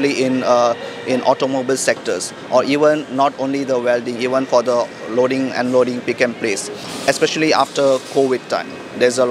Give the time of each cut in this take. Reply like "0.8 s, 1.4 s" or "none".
6.8 s